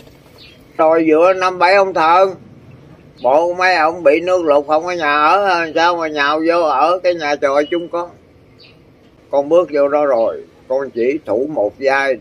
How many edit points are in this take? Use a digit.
2